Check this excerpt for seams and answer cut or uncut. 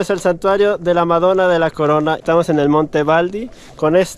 cut